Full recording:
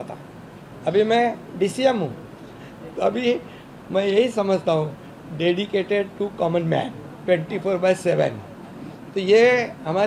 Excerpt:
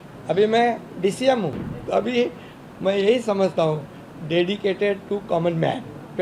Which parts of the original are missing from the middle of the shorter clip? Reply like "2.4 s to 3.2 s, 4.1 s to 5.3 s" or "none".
2.3 s to 2.8 s

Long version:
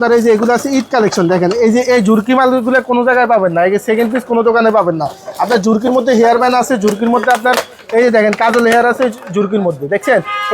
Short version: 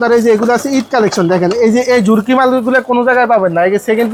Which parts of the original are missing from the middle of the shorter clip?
none

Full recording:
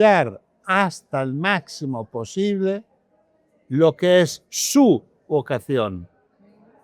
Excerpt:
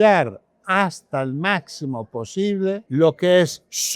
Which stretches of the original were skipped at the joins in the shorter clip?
2.8 s to 3.6 s

